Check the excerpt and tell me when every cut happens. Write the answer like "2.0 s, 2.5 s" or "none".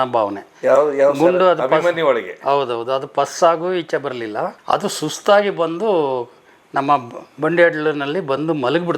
none

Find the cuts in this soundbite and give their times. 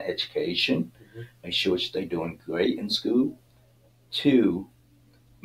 none

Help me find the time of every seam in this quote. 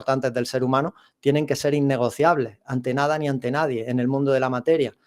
none

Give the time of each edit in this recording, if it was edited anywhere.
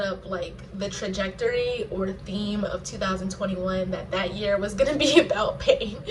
none

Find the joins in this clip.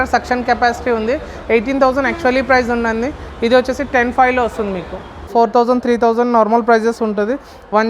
5.3 s

